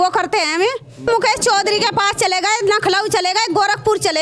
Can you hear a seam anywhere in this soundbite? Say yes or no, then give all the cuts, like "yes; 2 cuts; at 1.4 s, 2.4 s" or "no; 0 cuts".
yes; 1 cut; at 1.0 s